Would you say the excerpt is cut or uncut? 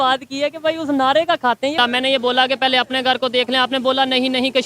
cut